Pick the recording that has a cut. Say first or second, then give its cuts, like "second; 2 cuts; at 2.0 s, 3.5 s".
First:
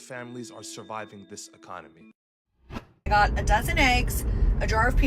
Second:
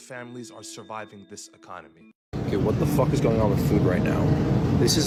first; 1 cut; at 2.4 s